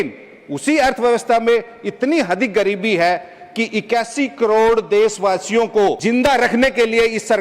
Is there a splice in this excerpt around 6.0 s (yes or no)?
yes